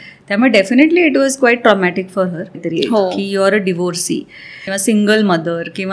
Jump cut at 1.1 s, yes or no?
no